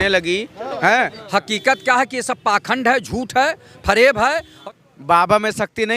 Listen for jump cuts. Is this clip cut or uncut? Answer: cut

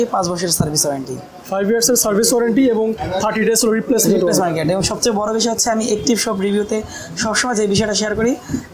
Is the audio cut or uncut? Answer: uncut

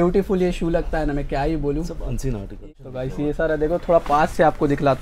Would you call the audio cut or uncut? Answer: cut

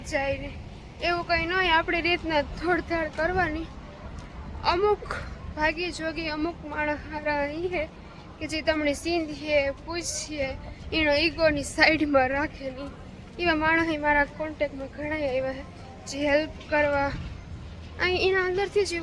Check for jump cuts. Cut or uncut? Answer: uncut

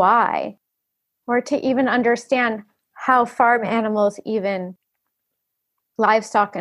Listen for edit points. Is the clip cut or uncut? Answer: uncut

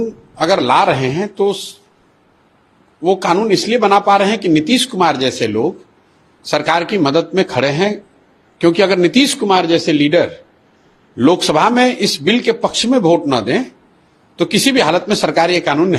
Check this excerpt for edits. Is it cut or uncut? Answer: uncut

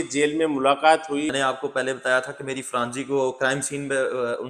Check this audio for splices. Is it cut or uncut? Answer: cut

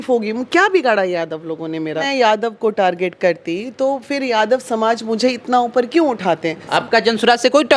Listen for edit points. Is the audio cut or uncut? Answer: cut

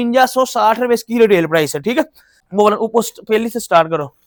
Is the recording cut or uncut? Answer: uncut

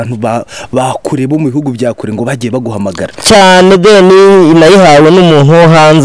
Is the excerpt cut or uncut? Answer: uncut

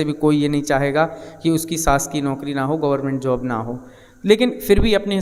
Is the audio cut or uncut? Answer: uncut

